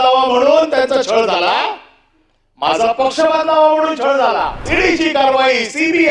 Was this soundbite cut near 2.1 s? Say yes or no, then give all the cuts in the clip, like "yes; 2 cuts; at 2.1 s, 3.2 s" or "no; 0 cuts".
no; 1 cut; at 4.7 s